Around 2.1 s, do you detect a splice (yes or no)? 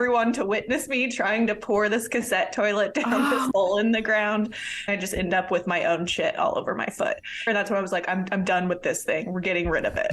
no